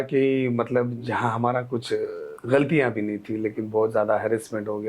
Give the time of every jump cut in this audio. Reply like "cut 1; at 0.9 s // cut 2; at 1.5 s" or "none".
cut 1; at 2.3 s